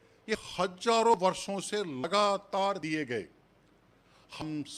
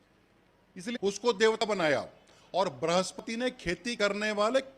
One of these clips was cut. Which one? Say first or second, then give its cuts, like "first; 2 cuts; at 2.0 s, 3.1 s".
second; 1 cut; at 1.0 s